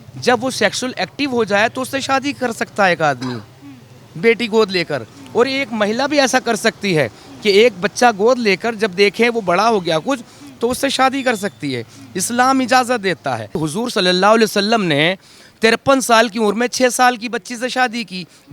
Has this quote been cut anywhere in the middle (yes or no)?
yes